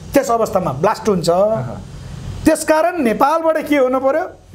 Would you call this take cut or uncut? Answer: uncut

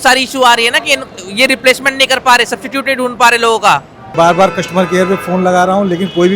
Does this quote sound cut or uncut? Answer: cut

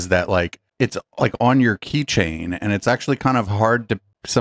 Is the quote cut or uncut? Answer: uncut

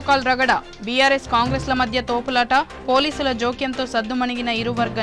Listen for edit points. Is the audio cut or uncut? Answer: uncut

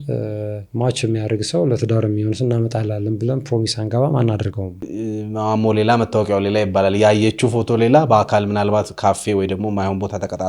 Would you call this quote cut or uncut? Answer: cut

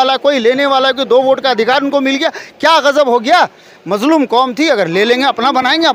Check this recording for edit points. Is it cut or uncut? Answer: uncut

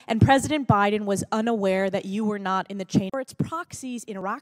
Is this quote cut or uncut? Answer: uncut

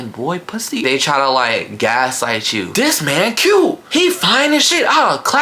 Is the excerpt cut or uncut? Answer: cut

